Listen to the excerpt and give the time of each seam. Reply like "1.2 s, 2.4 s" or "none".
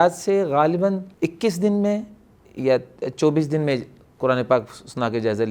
1.1 s